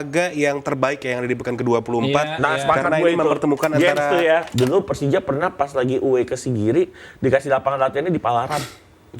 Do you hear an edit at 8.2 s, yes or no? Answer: no